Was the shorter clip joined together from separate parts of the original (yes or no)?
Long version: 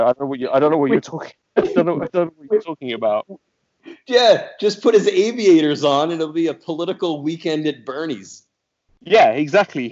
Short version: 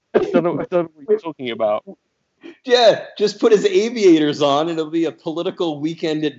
no